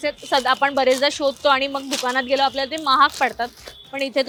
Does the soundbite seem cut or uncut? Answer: uncut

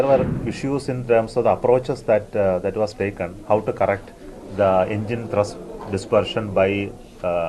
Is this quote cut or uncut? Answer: uncut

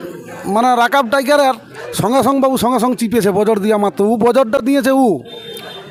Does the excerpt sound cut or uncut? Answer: uncut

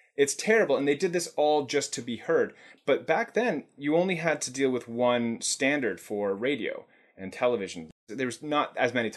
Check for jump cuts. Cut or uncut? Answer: cut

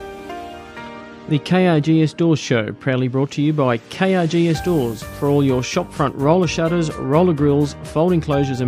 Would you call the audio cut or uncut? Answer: cut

